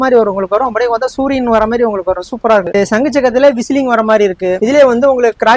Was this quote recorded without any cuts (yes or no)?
no